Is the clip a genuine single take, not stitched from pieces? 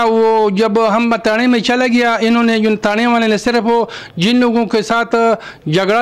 yes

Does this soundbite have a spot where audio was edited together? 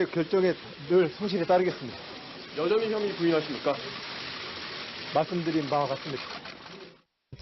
no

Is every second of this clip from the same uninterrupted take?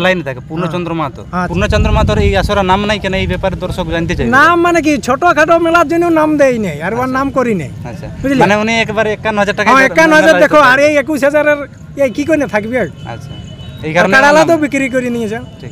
no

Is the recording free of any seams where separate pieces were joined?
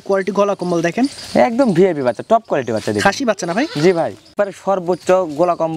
no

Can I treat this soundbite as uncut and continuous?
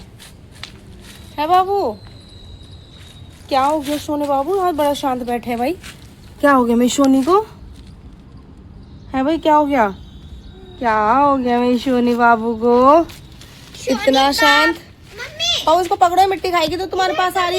yes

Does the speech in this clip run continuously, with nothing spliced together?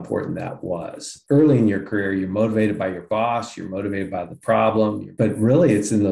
no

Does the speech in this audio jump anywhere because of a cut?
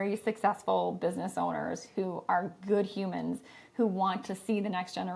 no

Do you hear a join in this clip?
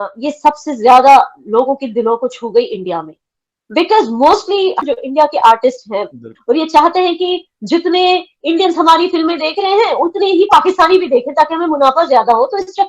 yes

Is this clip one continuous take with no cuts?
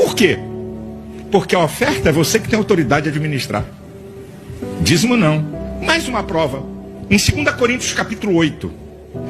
no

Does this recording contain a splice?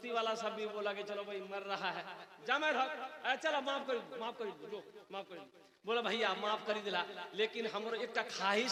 no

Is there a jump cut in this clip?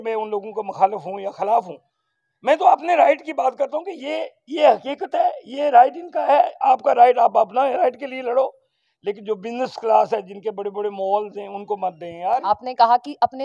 yes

